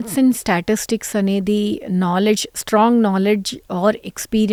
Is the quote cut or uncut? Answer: uncut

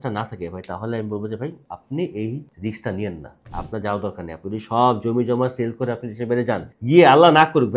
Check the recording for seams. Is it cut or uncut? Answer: uncut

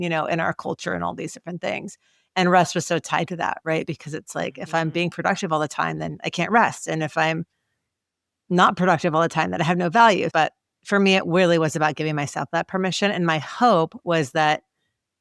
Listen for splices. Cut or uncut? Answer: cut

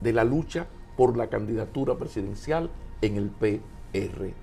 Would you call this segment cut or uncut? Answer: uncut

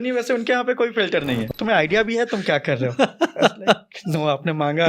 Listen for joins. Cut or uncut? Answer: cut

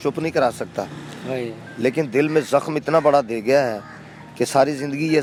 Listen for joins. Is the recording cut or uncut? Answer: uncut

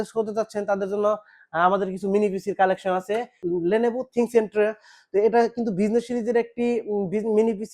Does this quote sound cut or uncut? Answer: cut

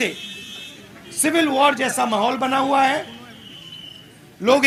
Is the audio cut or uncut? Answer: uncut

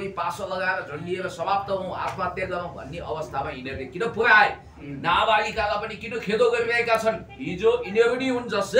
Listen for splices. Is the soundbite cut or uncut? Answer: uncut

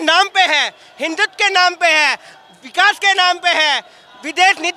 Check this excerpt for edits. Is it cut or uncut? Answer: uncut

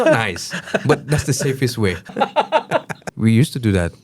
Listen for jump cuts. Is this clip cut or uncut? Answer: cut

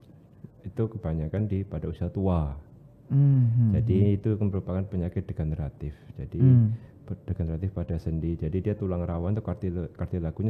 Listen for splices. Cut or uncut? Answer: uncut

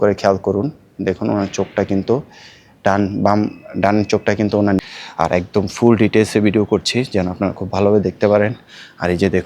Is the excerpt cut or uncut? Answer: cut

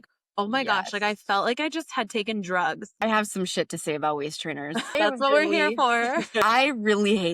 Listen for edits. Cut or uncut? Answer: cut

